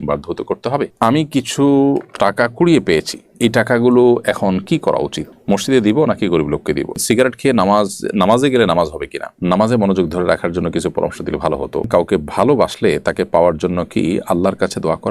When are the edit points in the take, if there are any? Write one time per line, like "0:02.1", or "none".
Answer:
0:00.9
0:06.9
0:09.3
0:11.9